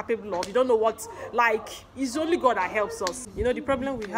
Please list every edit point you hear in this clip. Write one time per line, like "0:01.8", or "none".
0:03.2